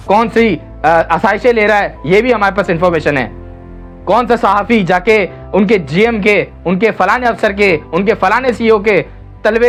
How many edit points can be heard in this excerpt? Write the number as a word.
zero